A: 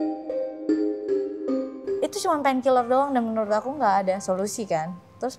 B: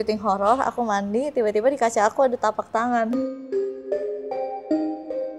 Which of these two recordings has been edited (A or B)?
A